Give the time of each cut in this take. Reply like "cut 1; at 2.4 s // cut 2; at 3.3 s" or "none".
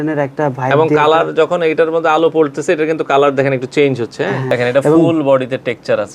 cut 1; at 4.5 s